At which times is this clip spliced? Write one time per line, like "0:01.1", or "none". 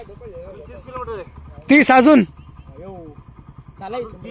0:01.7